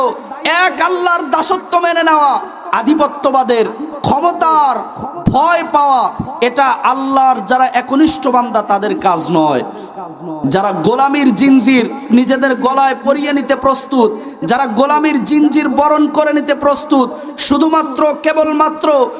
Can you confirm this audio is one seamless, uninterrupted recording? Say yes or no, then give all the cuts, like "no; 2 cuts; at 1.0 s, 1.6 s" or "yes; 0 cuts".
no; 2 cuts; at 2.6 s, 12.0 s